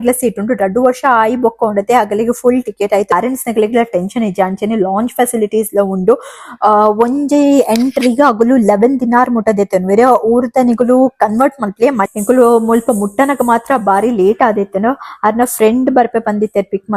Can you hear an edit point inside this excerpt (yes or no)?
yes